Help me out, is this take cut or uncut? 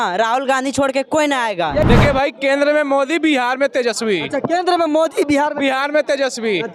cut